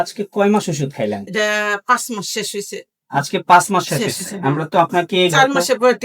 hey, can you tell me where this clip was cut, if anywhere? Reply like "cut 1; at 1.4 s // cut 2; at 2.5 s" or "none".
none